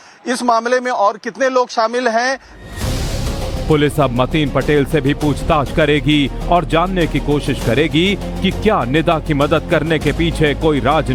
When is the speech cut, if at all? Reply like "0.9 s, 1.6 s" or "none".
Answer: none